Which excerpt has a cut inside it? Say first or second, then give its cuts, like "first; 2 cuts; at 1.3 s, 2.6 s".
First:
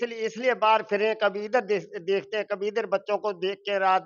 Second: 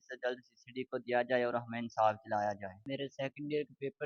second; 1 cut; at 2.9 s